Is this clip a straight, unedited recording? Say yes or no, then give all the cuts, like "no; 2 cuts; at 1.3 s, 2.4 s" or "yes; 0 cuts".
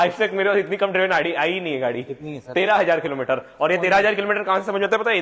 yes; 0 cuts